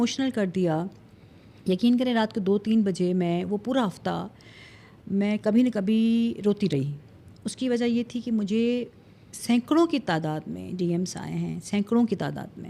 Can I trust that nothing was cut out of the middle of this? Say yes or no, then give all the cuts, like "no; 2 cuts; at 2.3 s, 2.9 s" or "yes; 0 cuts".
yes; 0 cuts